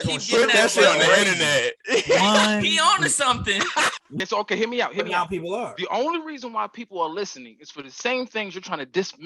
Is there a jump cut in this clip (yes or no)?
yes